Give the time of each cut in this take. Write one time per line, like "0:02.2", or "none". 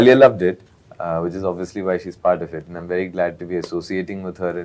none